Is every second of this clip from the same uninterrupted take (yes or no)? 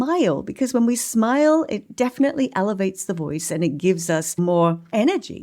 no